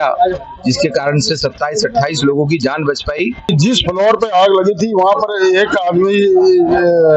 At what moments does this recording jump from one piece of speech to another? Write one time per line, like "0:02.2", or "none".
0:03.5